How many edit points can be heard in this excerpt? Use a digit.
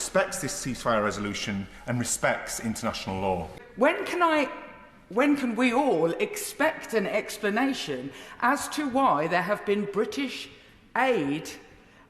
1